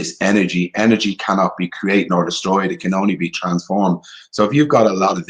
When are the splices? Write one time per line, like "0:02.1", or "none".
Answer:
none